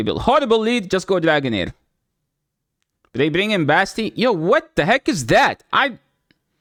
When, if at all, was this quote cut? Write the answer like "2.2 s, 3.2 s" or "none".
none